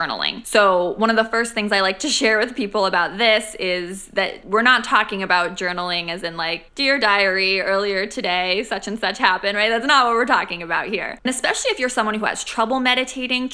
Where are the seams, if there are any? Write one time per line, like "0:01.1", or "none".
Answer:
0:11.2